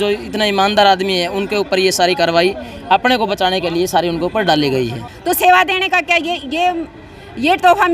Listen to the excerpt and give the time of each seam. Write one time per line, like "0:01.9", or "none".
0:05.1